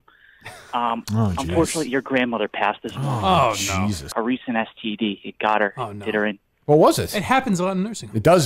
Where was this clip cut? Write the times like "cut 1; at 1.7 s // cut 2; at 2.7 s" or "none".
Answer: cut 1; at 4.1 s

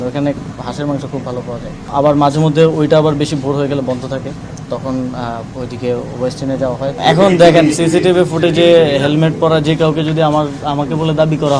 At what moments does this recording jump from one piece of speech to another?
cut 1; at 1.8 s // cut 2; at 6.9 s

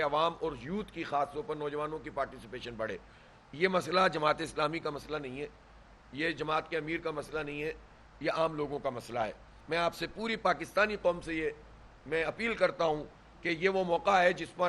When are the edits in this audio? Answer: cut 1; at 9.5 s

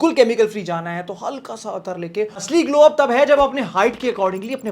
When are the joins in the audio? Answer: cut 1; at 2.4 s

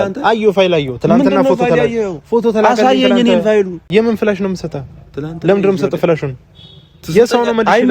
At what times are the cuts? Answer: cut 1; at 3.8 s

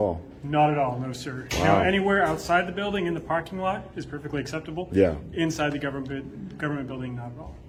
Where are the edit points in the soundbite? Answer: none

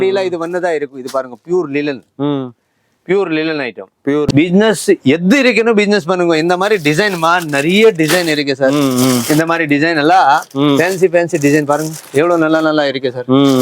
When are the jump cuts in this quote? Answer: cut 1; at 4.3 s

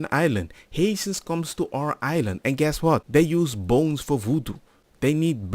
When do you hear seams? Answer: cut 1; at 3.0 s

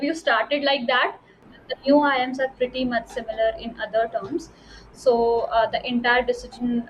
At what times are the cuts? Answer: cut 1; at 1.5 s

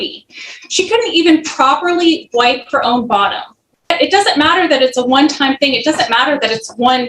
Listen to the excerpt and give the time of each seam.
cut 1; at 3.9 s

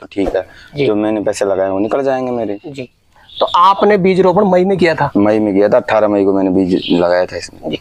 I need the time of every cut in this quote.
none

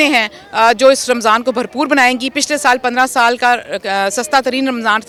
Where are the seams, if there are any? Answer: none

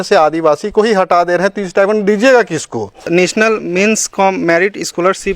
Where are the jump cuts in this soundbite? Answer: cut 1; at 3.0 s

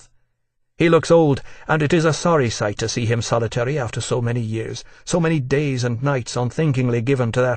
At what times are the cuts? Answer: cut 1; at 5.0 s

